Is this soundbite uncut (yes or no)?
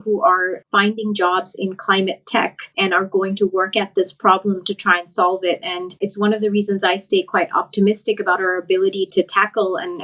no